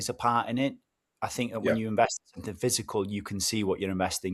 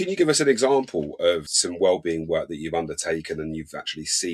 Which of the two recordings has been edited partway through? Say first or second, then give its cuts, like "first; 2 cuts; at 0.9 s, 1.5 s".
second; 1 cut; at 1.5 s